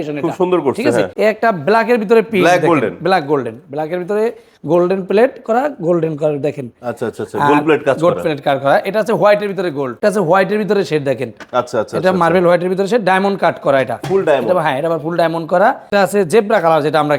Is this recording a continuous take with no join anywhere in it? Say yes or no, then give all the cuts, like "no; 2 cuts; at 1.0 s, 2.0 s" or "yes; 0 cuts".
no; 3 cuts; at 1.1 s, 10.0 s, 15.9 s